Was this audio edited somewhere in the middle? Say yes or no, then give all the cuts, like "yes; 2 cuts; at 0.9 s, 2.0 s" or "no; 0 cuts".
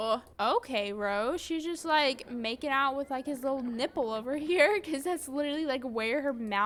no; 0 cuts